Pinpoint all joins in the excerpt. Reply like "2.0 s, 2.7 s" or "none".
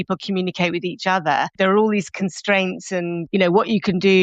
1.5 s, 3.3 s